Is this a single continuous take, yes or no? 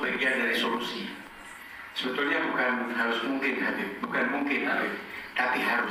yes